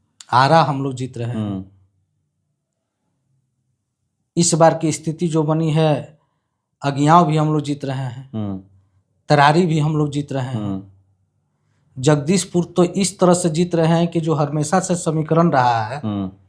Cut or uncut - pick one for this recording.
uncut